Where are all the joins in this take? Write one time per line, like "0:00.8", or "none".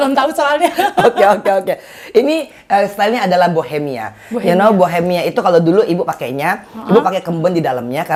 none